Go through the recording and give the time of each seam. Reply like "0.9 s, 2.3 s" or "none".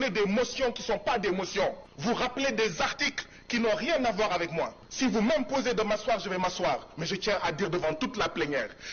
1.9 s, 4.8 s